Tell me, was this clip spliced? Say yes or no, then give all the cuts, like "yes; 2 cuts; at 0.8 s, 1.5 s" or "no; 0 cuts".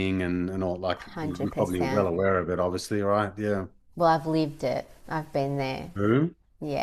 no; 0 cuts